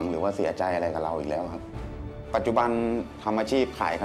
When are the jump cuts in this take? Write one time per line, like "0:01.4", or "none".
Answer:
0:01.7
0:03.1